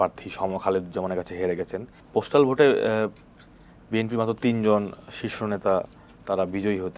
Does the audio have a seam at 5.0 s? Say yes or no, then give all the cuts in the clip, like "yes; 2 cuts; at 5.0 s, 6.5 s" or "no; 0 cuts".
no; 1 cut; at 2.0 s